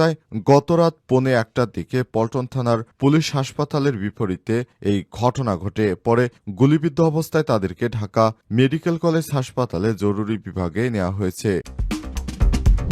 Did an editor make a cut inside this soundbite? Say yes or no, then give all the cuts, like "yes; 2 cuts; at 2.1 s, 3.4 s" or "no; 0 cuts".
yes; 1 cut; at 11.8 s